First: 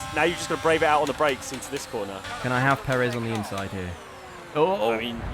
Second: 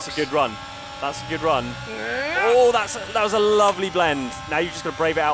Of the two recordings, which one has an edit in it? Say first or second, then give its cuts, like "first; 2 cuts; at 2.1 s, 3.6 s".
first; 1 cut; at 2.2 s